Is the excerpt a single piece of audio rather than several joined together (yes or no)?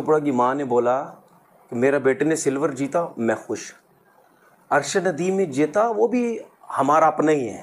yes